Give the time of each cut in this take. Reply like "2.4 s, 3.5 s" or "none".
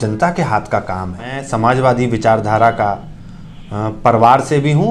1.4 s

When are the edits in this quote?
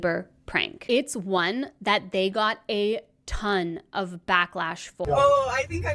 5.0 s

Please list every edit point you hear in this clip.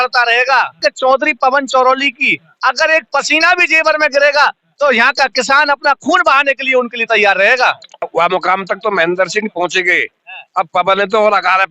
0.8 s, 8.0 s

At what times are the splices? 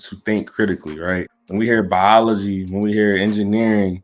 1.4 s

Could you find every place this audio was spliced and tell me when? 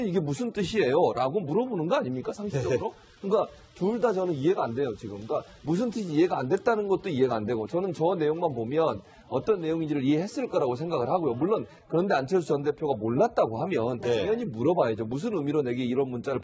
none

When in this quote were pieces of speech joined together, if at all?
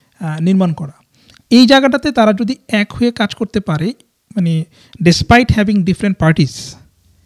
none

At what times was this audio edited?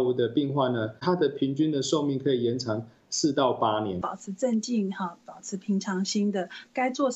4.0 s

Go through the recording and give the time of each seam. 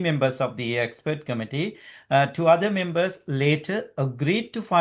none

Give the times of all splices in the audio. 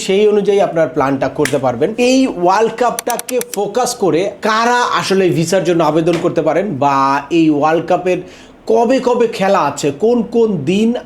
1.9 s, 3.1 s, 4.3 s

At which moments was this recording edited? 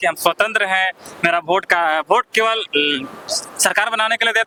none

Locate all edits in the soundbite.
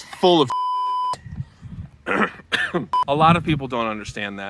2.9 s

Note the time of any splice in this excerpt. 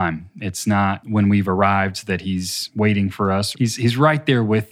1.1 s, 2.6 s, 3.5 s

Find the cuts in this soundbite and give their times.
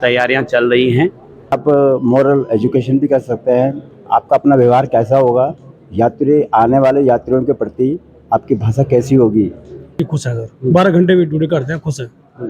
1.6 s, 10.0 s

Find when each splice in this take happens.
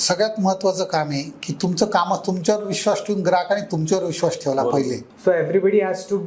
5.0 s

